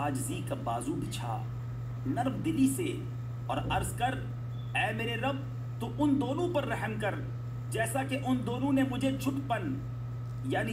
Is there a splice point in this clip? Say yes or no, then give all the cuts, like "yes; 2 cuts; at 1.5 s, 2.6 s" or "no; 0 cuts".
no; 0 cuts